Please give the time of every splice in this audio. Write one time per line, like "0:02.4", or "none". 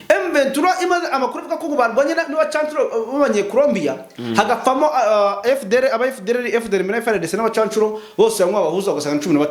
none